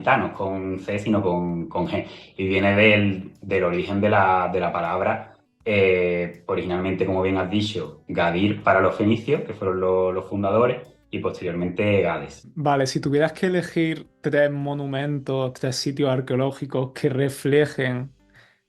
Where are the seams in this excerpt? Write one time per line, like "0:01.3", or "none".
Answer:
none